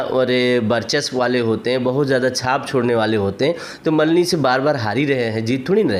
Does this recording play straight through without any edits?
yes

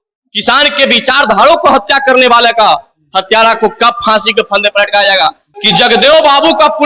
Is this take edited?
yes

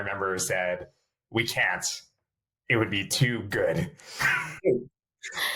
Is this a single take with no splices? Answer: yes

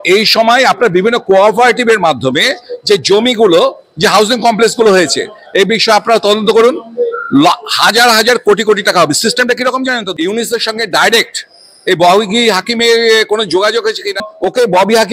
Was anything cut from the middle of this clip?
yes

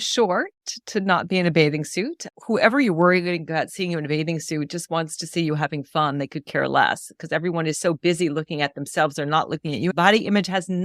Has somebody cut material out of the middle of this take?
yes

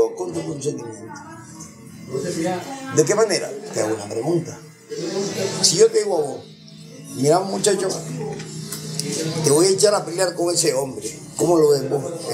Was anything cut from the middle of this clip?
no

